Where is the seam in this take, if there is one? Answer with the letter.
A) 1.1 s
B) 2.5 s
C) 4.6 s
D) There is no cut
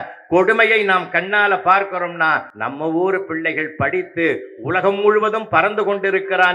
B